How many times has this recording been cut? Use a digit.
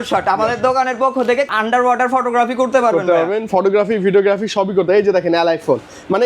1